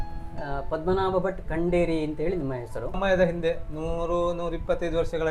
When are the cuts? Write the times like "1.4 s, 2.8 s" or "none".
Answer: 3.0 s

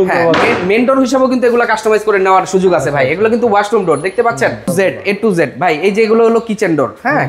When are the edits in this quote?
4.7 s

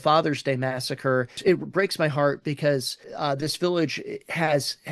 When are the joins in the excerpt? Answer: 1.4 s, 3.1 s

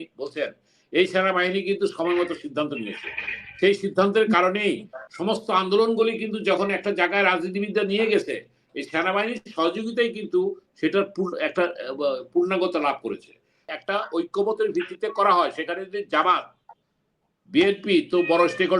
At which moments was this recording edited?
13.7 s

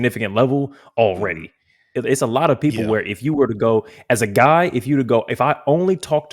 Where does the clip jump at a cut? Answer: 1.9 s

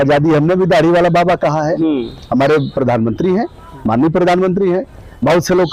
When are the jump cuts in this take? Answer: none

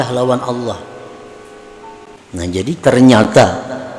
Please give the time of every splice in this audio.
2.1 s

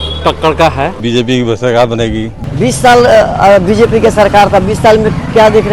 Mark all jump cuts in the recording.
1.0 s, 2.3 s

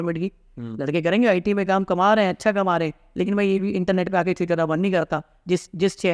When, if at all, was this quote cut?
none

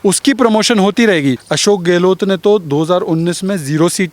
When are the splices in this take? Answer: 1.5 s

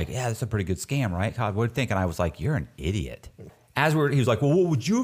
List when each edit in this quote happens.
3.5 s

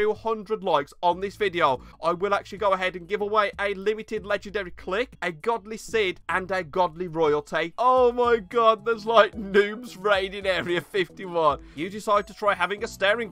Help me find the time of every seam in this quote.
5.1 s, 6.2 s, 7.7 s, 11.7 s

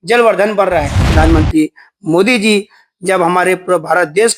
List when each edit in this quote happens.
1.1 s

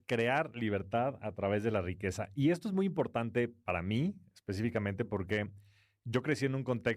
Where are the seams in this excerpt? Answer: none

